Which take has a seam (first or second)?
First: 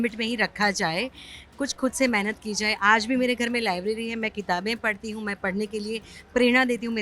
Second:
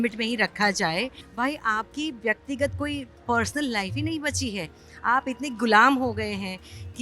second